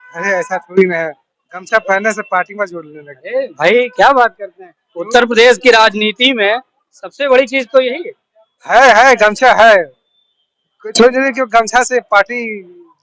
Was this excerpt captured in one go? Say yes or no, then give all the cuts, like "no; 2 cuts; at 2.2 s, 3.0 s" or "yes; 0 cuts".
yes; 0 cuts